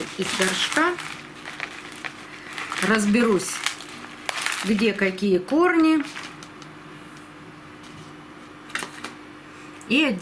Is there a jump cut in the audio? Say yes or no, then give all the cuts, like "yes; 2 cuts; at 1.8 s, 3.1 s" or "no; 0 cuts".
no; 0 cuts